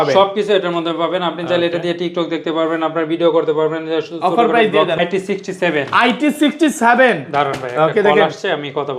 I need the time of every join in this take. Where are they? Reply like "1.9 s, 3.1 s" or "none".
5.0 s